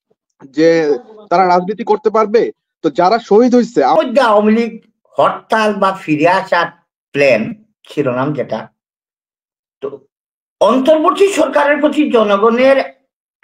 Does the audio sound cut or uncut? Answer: cut